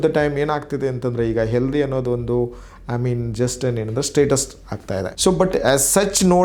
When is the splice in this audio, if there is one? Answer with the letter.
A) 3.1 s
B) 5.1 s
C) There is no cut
B